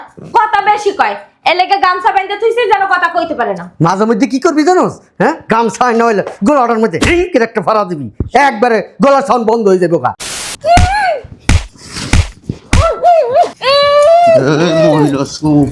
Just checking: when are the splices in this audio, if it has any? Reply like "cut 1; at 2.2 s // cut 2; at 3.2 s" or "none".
cut 1; at 10.2 s